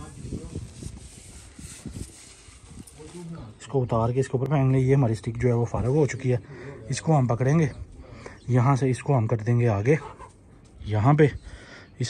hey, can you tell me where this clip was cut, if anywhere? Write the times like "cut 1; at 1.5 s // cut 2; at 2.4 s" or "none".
none